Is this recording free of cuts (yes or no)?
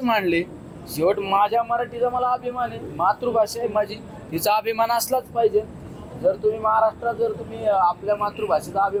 yes